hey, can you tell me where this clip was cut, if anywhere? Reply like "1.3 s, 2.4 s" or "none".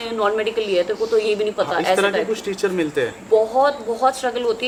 none